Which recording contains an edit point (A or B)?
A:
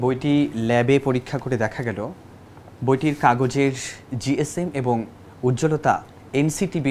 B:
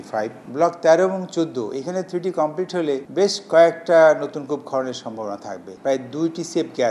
B